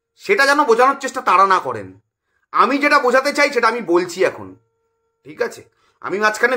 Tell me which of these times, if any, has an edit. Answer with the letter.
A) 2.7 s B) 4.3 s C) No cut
C